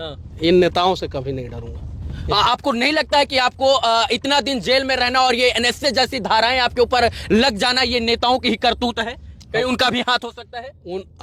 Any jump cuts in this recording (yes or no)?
no